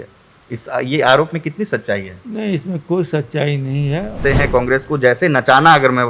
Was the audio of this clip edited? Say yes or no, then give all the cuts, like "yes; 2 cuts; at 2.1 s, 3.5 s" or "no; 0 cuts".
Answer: yes; 1 cut; at 4.2 s